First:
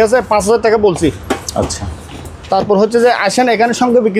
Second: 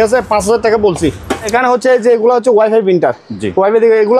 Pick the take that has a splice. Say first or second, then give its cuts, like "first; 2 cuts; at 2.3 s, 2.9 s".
second; 1 cut; at 1.5 s